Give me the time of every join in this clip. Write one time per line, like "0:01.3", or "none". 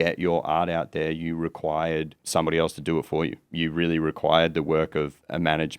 0:02.2
0:03.5